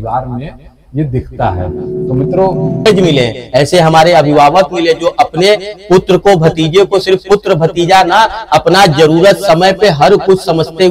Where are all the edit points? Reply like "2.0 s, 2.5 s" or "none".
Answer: 2.9 s